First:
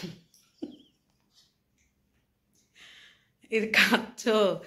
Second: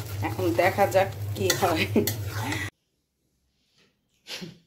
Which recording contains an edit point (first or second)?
second